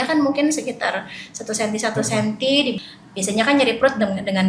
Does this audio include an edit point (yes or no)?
yes